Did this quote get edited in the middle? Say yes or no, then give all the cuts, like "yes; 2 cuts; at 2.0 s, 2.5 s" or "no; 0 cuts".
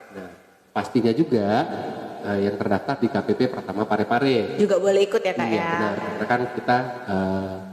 no; 0 cuts